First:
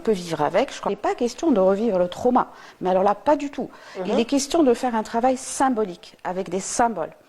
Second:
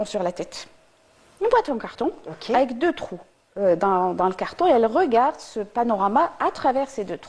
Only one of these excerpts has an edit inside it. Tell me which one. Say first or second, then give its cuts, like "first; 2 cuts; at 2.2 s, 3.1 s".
first; 1 cut; at 0.9 s